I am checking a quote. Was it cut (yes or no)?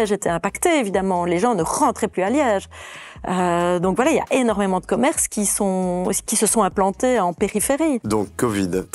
no